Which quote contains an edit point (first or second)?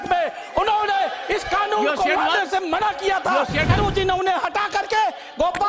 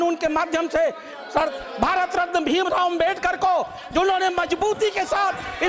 first